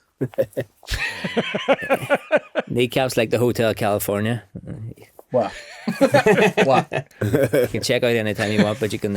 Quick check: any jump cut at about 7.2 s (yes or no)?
yes